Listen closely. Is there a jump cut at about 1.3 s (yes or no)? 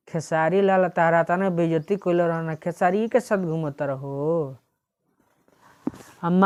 no